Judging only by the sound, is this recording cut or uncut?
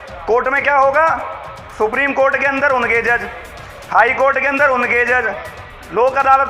uncut